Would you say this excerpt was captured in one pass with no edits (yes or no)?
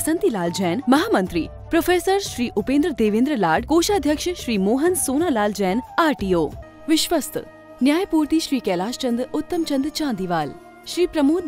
no